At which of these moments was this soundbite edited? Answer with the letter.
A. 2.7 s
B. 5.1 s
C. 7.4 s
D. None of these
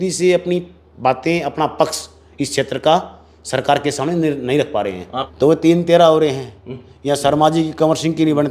B